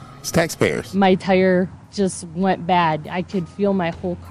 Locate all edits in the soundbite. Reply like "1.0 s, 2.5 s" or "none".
1.8 s

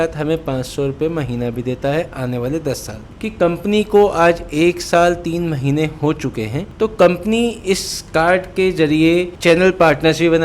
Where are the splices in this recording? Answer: none

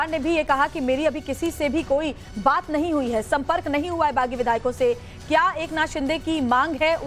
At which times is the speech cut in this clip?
3.3 s

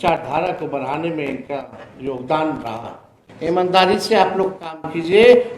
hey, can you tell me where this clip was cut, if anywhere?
3.2 s

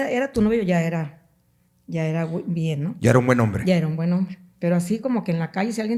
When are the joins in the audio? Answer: none

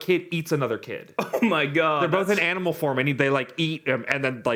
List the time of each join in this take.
none

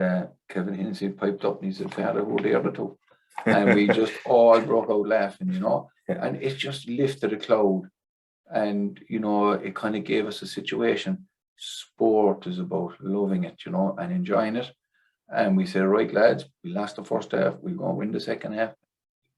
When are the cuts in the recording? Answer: none

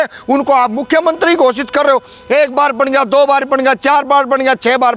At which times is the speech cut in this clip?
none

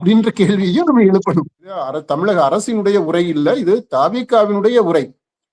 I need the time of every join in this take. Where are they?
2.0 s

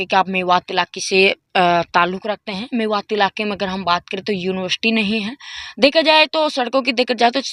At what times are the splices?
none

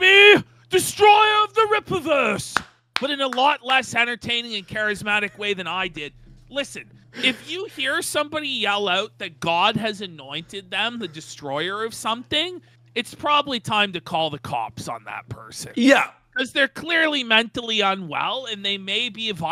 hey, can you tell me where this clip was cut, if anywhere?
none

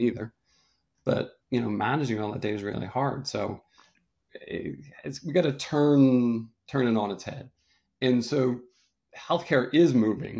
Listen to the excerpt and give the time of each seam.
none

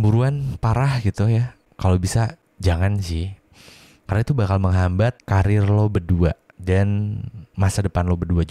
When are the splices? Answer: 1.6 s, 2.5 s, 5.2 s, 6.5 s

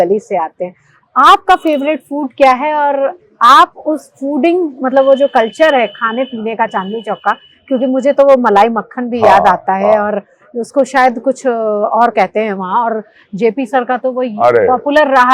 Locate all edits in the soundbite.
none

